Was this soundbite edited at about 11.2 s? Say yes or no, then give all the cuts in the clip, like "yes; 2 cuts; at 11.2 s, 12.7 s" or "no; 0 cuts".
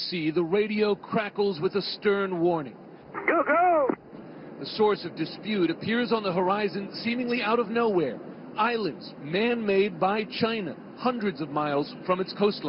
yes; 1 cut; at 11.2 s